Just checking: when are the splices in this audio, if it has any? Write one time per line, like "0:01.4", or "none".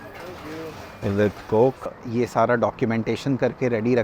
0:02.0